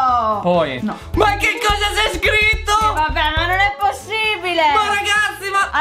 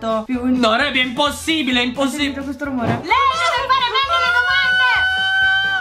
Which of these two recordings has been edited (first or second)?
second